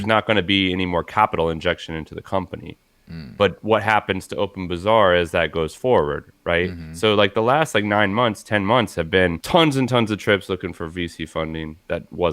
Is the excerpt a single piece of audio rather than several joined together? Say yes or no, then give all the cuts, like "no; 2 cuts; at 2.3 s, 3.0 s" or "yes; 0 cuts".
no; 1 cut; at 9.4 s